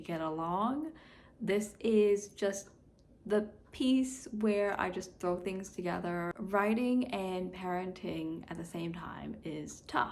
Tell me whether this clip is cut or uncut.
cut